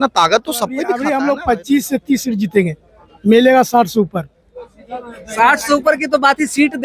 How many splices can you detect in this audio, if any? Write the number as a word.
one